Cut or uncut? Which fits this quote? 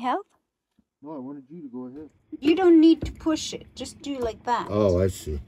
cut